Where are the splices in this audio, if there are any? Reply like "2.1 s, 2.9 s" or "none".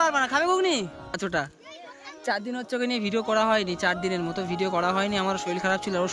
1.1 s